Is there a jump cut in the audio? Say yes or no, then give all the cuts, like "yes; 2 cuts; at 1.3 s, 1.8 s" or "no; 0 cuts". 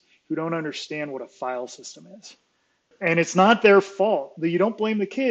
yes; 1 cut; at 2.9 s